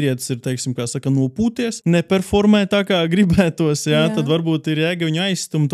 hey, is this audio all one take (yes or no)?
no